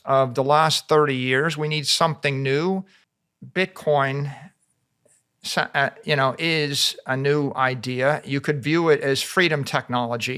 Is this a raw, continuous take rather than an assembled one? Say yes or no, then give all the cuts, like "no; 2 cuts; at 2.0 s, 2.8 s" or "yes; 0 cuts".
no; 1 cut; at 3.0 s